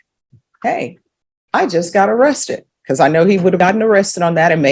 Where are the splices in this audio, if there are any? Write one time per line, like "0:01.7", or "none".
0:03.6